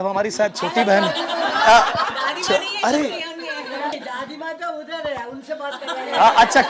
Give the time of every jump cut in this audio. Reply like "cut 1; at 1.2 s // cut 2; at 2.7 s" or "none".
cut 1; at 4.0 s